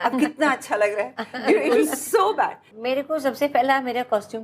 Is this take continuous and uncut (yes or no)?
no